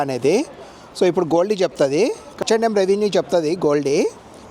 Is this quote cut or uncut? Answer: cut